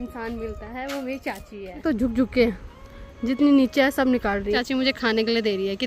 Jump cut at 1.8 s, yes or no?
yes